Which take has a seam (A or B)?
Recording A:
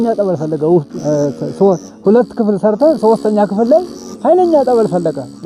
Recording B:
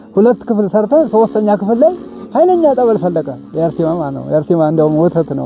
A